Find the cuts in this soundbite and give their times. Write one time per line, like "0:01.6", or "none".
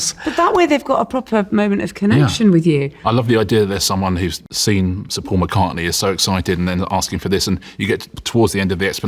0:02.9
0:04.5